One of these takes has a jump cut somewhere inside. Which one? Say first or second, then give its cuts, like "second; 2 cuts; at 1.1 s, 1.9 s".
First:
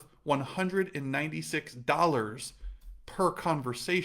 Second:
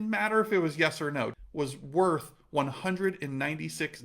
second; 1 cut; at 1.3 s